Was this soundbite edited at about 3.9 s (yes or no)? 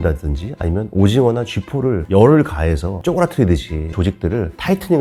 no